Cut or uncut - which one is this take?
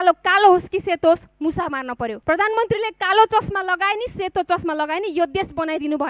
cut